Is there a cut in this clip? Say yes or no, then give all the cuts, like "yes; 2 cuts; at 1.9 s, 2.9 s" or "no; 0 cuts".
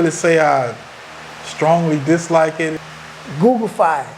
yes; 1 cut; at 2.7 s